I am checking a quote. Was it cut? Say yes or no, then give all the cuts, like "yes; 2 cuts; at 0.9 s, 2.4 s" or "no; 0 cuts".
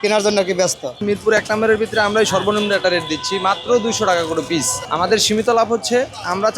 yes; 2 cuts; at 1.0 s, 4.8 s